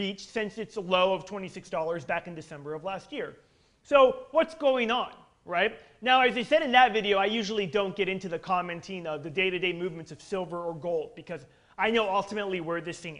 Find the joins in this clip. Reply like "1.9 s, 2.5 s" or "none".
2.1 s